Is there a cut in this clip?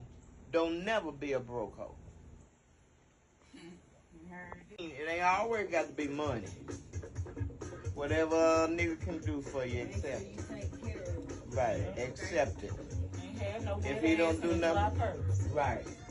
no; 0 cuts

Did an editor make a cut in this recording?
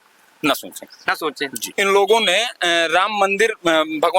yes; 1 cut; at 1.6 s

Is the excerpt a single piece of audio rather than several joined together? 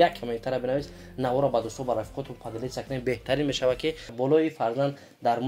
no; 1 cut; at 4.1 s

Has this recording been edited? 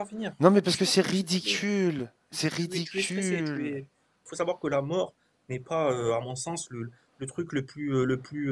yes; 1 cut; at 4.3 s

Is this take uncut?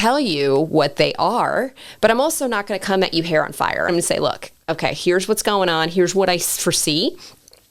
no; 1 cut; at 3.9 s

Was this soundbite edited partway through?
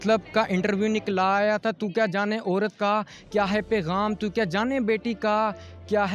no; 0 cuts

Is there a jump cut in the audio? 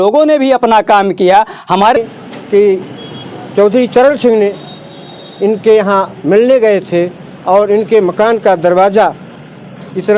yes; 1 cut; at 2.0 s

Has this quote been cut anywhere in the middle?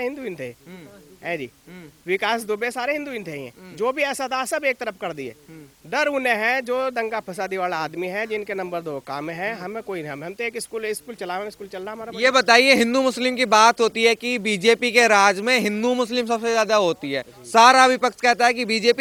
no; 0 cuts

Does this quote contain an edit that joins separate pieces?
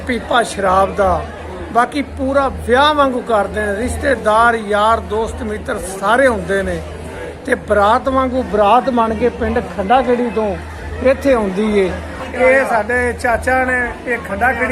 no; 0 cuts

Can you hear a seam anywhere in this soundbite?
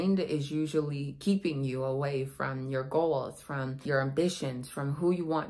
yes; 1 cut; at 3.7 s

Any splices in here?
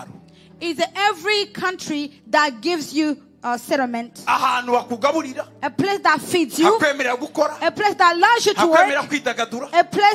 no; 0 cuts

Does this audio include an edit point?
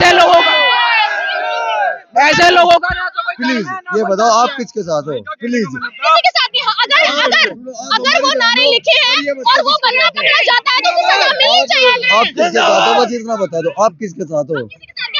no; 0 cuts

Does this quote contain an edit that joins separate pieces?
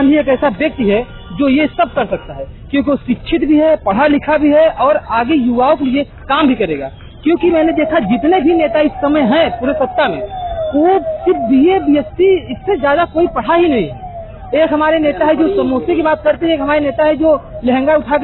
no; 0 cuts

